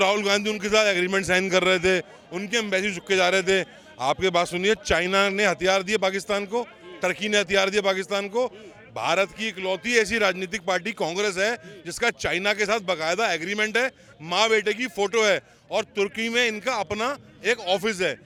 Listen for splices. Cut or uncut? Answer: uncut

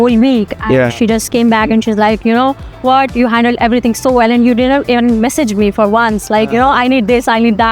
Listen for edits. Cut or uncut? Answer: uncut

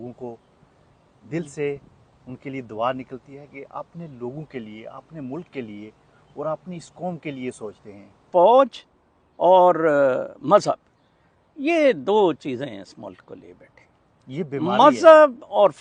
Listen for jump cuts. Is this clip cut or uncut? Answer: cut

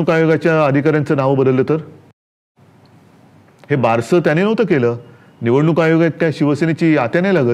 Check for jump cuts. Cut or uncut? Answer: uncut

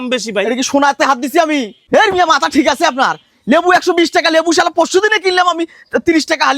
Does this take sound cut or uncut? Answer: cut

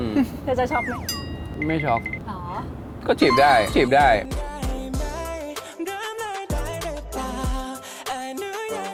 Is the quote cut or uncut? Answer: uncut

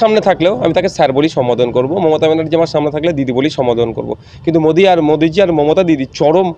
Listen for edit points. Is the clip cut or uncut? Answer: uncut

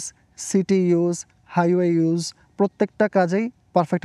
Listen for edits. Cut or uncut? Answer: uncut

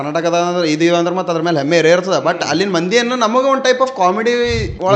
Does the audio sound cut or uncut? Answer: uncut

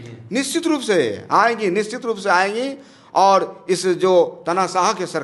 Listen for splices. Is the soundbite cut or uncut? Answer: uncut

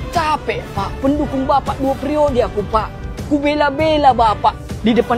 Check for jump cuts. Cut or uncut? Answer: uncut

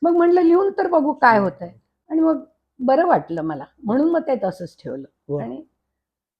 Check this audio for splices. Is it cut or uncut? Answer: uncut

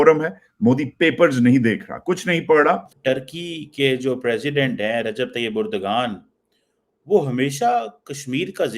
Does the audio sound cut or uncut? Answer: cut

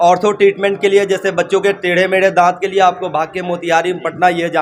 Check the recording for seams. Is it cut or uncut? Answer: uncut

